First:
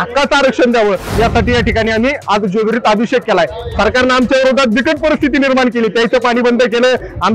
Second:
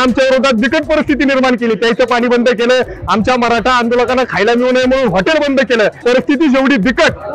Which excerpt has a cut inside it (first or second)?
second